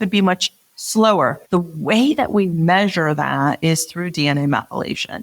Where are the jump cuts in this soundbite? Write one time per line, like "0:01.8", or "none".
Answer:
0:01.4